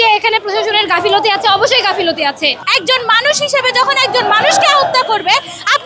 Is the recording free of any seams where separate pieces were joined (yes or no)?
no